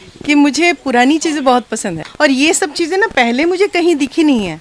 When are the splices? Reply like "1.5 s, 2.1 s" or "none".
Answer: 2.1 s